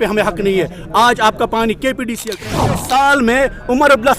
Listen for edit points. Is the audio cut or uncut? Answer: cut